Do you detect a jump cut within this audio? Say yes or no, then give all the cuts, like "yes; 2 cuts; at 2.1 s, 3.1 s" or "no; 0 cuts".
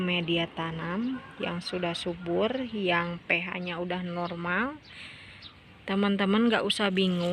no; 0 cuts